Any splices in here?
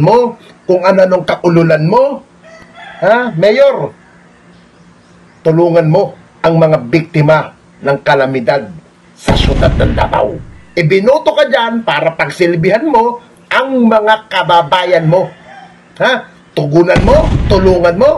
yes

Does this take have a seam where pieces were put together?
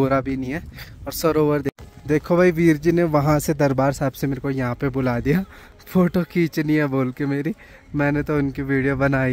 yes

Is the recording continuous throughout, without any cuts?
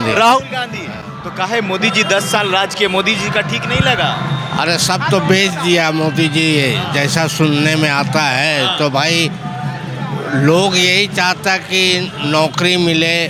yes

